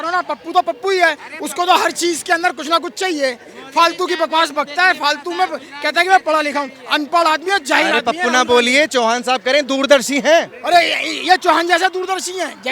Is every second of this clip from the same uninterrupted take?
yes; 0 cuts

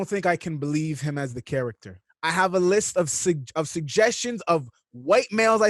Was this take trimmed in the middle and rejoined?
yes; 1 cut; at 2.0 s

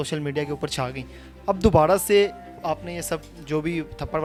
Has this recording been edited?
no; 0 cuts

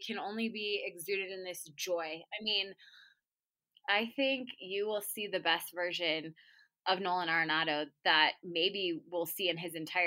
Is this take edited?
yes; 1 cut; at 3.3 s

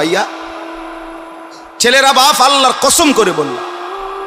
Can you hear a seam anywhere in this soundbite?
no; 0 cuts

